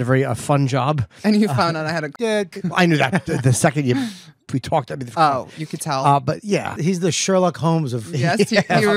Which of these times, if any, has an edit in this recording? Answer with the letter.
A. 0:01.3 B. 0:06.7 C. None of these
B